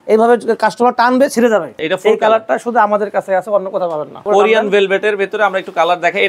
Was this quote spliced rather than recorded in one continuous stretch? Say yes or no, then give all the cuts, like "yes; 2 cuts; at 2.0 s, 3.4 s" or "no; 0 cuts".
yes; 2 cuts; at 1.8 s, 4.3 s